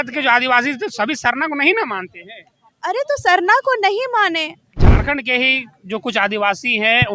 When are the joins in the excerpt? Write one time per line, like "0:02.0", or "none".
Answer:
0:04.7